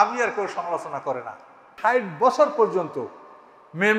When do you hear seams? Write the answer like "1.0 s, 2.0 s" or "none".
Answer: 1.7 s